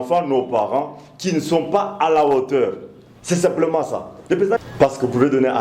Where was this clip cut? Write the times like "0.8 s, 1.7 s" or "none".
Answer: 4.6 s

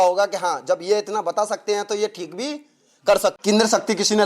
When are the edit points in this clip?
3.4 s

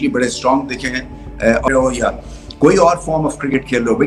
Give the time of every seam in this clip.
1.7 s

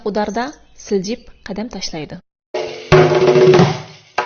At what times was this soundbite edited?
2.7 s

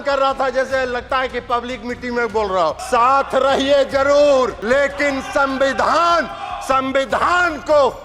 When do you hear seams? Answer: 2.8 s, 4.6 s

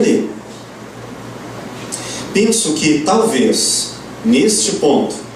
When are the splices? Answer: 1.0 s

